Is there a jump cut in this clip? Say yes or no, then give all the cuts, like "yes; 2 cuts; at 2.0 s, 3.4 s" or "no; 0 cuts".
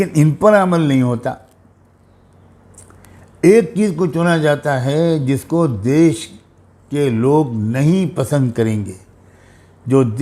no; 0 cuts